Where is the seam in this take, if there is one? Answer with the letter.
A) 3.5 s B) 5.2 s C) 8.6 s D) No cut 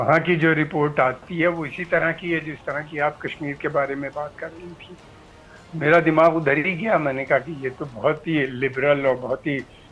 D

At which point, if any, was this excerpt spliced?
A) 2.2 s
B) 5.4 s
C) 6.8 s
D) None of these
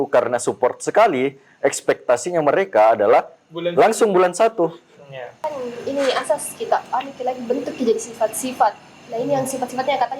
B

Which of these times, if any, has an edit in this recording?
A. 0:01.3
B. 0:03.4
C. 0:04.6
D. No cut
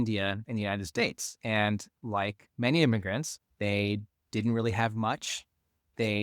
B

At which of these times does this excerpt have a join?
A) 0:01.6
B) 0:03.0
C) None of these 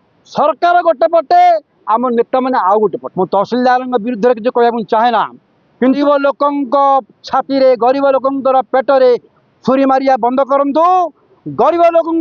B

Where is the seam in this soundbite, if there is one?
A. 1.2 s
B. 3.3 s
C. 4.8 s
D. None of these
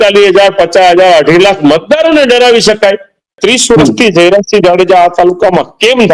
B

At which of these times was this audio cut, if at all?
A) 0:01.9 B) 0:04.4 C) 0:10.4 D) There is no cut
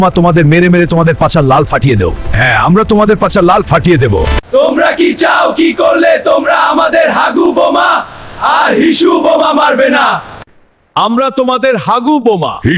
B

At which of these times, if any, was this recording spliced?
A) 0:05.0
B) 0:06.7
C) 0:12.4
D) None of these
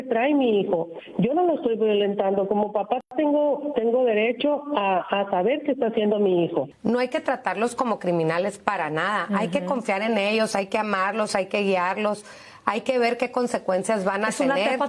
B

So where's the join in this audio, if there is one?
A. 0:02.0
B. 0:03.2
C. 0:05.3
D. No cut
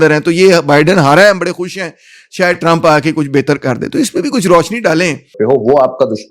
C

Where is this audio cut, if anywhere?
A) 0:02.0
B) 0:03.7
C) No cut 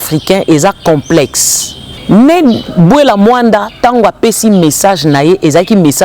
A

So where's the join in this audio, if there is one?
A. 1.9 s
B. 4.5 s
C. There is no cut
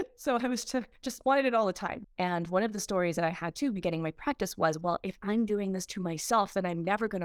A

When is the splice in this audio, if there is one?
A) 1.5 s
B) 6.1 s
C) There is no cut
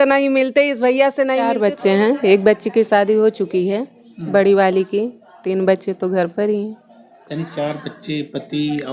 A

